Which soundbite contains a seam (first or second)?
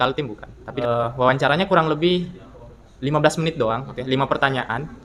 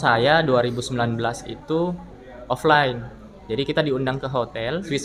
first